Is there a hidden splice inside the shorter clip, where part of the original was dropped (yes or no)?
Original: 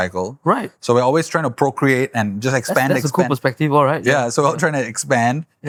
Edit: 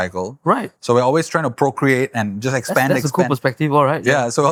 no